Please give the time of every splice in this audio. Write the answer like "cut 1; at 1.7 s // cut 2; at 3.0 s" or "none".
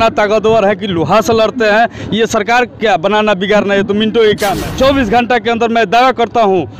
cut 1; at 4.6 s